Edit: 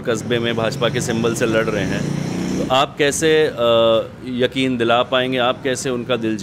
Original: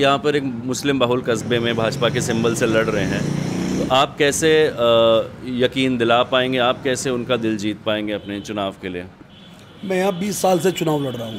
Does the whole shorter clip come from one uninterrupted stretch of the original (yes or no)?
yes